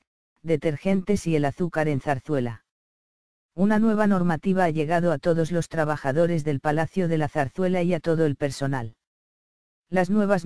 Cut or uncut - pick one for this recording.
uncut